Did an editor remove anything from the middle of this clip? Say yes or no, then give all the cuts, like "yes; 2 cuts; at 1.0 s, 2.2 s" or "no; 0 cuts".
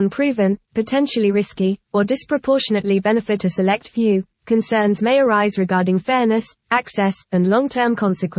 no; 0 cuts